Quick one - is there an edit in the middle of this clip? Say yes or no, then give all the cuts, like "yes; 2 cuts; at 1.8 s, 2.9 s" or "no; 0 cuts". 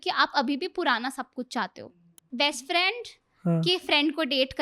yes; 1 cut; at 1.8 s